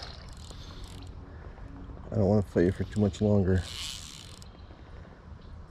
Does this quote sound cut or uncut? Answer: uncut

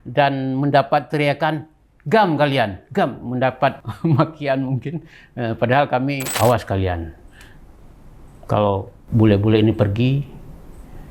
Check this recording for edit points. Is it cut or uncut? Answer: cut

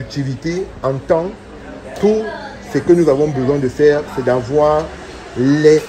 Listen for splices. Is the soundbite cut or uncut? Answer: uncut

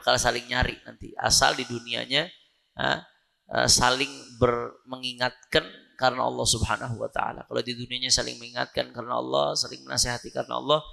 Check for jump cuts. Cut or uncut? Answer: uncut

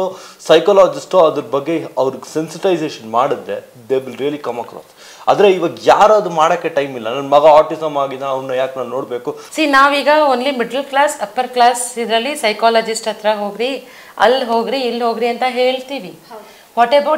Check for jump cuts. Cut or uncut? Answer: cut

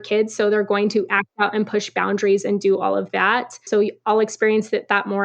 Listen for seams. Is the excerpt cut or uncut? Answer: cut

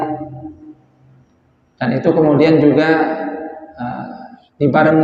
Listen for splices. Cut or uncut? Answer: uncut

